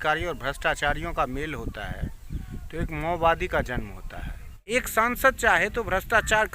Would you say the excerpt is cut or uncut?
cut